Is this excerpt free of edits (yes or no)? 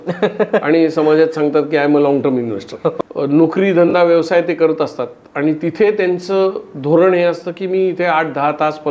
no